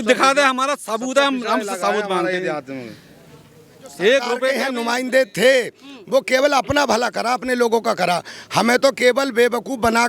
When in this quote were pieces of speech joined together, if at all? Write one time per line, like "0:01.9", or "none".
0:04.6